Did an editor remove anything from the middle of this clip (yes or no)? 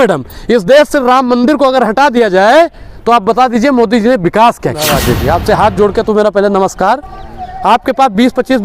yes